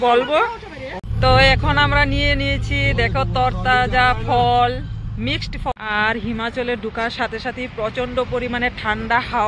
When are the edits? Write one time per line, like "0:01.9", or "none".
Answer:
0:01.1
0:05.7